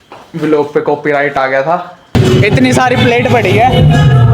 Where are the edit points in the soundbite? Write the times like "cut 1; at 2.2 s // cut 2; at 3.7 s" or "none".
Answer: cut 1; at 2.1 s